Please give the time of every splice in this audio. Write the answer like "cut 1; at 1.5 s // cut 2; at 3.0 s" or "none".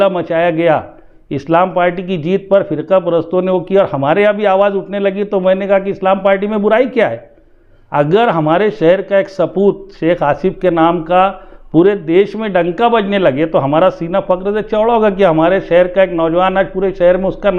none